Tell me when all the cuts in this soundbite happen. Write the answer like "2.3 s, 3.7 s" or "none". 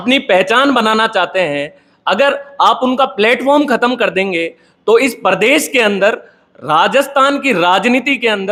none